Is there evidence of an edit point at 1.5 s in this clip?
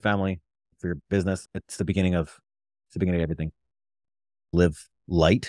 no; 1 cut; at 4.5 s

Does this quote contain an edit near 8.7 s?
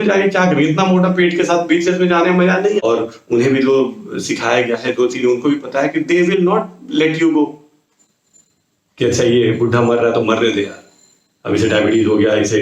no; 1 cut; at 2.8 s

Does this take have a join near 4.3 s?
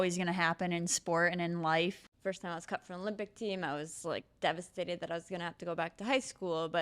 no; 1 cut; at 2.1 s

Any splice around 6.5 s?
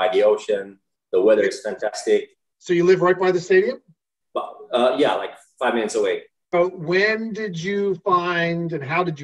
yes; 1 cut; at 6.5 s

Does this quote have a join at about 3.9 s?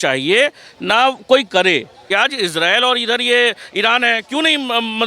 no; 1 cut; at 2.0 s

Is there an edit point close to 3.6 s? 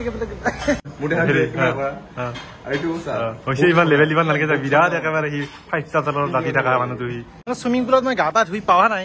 no; 2 cuts; at 0.9 s, 7.3 s

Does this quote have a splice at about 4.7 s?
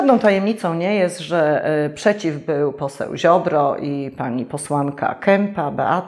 no; 0 cuts

